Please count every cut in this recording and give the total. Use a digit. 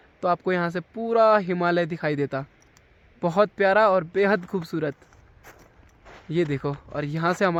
0